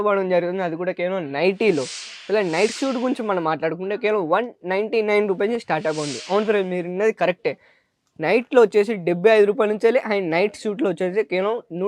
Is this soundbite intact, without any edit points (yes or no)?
yes